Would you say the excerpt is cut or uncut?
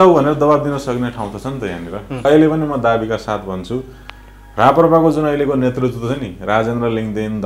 cut